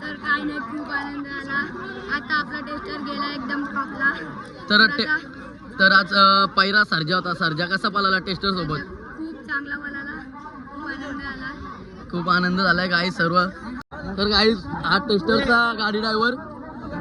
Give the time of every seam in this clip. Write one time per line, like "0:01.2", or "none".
0:13.8